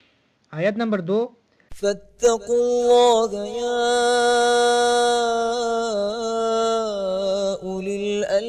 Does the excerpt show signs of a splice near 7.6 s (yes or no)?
yes